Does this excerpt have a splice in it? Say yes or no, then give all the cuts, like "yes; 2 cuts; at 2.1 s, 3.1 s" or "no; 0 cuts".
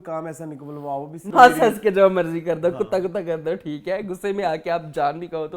yes; 1 cut; at 1.2 s